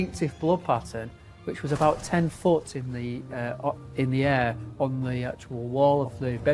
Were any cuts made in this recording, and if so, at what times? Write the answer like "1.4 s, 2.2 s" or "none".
none